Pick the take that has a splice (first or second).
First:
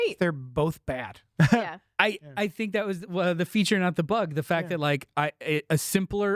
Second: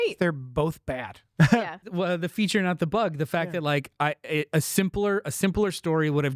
second